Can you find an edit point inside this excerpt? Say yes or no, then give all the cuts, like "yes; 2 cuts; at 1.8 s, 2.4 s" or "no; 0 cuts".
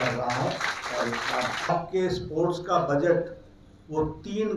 yes; 1 cut; at 1.7 s